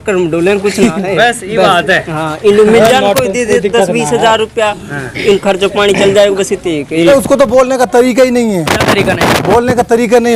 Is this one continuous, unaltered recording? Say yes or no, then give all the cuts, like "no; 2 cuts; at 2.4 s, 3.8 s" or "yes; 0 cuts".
no; 1 cut; at 7.1 s